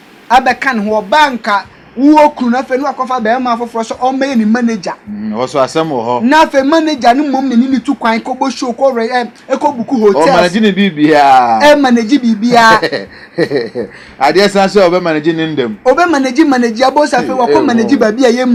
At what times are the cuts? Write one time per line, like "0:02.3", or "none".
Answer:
none